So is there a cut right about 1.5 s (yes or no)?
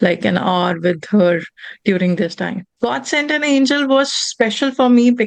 no